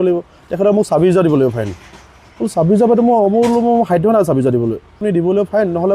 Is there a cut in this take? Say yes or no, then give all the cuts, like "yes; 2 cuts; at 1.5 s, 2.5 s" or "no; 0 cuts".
yes; 1 cut; at 5.0 s